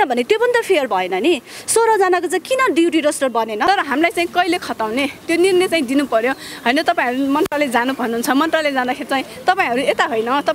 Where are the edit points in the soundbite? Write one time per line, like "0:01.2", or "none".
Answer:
0:03.7